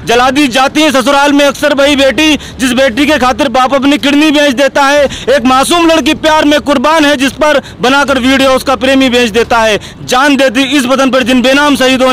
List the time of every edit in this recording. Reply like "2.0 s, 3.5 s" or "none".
none